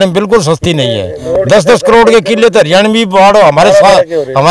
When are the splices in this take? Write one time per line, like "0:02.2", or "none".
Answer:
none